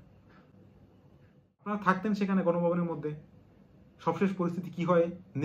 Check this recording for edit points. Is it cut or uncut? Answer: cut